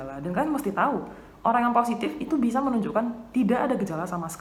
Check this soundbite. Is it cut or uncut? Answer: uncut